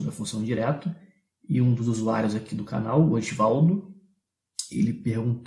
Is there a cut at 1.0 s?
no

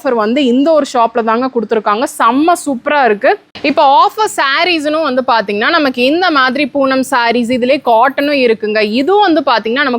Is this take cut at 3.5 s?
yes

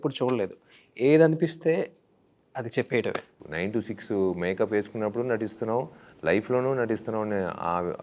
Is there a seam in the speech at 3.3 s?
yes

